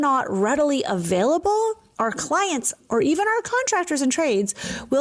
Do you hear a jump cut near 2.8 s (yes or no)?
yes